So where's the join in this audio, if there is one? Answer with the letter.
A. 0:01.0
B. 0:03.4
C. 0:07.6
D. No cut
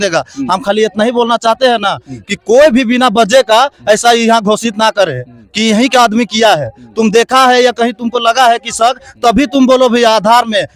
D